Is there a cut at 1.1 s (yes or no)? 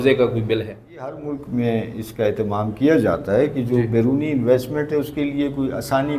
yes